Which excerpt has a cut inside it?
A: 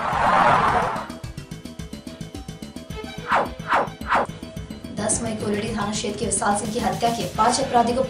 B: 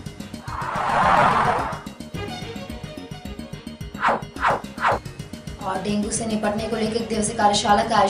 A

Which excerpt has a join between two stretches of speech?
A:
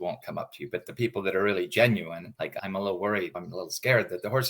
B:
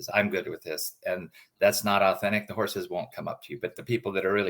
A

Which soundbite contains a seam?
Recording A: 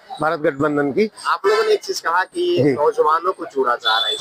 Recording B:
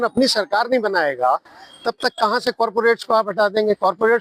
A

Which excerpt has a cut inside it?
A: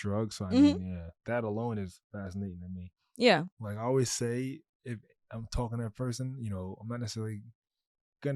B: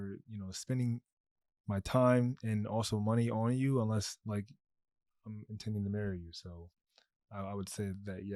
A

